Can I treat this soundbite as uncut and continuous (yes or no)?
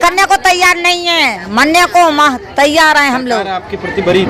yes